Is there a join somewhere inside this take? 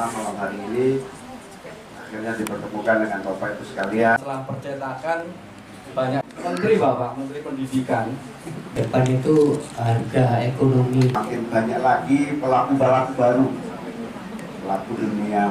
yes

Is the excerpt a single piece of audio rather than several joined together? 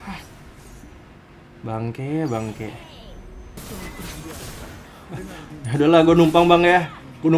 no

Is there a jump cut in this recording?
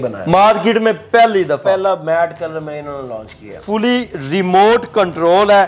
yes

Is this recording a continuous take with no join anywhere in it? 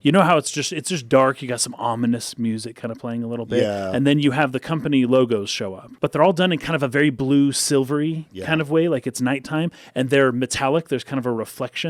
no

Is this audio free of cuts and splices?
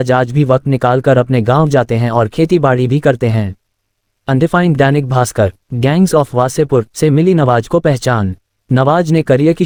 yes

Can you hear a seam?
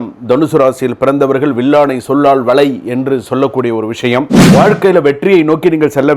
yes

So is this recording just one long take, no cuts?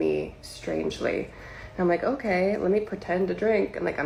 yes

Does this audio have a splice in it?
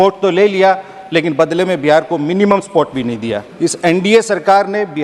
yes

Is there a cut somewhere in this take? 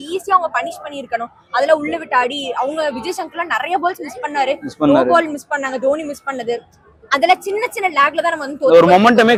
no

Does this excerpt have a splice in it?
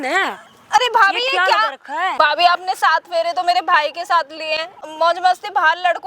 yes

